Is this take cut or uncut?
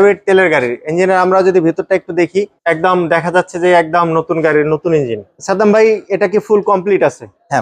uncut